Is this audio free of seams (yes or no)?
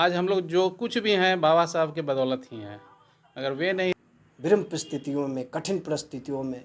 no